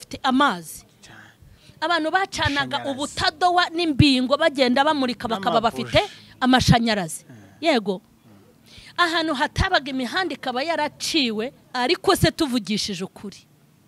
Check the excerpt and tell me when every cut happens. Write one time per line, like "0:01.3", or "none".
0:11.6